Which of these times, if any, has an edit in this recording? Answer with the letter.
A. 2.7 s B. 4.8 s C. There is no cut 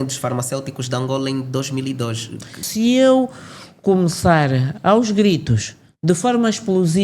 A